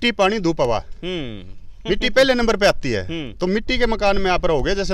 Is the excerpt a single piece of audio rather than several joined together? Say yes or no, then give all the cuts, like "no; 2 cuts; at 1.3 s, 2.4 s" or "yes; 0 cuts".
yes; 0 cuts